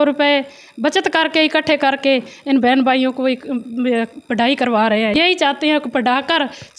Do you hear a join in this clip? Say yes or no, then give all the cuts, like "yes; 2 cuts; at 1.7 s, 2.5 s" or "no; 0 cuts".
yes; 1 cut; at 5.1 s